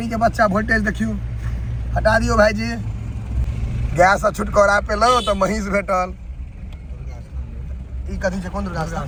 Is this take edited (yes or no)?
no